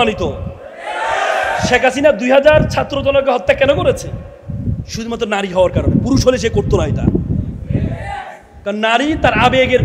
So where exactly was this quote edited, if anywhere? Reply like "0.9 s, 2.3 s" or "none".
none